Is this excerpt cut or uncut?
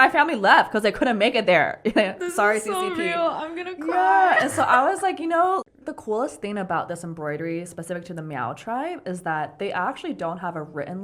cut